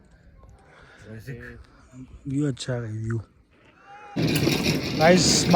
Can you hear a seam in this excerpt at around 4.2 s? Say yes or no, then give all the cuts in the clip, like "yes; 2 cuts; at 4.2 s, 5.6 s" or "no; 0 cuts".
yes; 1 cut; at 4.2 s